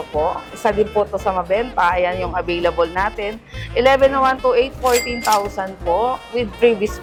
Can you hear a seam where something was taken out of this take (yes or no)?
no